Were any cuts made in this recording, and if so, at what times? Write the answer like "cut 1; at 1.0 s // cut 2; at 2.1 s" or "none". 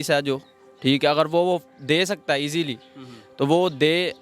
none